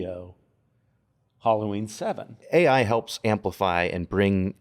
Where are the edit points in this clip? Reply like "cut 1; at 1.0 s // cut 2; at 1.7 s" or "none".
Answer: cut 1; at 2.4 s